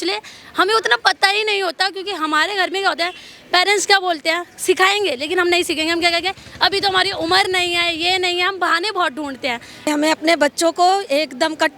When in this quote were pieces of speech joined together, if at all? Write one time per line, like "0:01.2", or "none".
0:09.9